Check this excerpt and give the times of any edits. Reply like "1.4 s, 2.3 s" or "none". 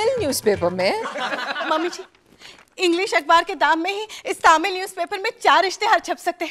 1.7 s